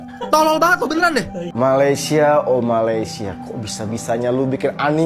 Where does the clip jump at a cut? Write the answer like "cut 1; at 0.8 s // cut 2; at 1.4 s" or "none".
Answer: cut 1; at 1.4 s